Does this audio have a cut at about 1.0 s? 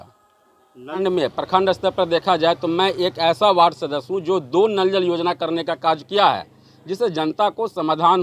yes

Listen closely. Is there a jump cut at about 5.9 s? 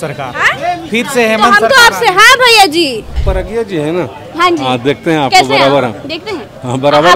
no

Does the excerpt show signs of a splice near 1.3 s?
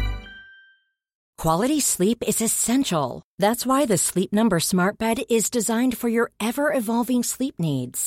yes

